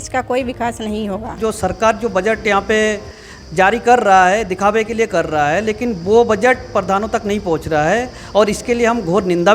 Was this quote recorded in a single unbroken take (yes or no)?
no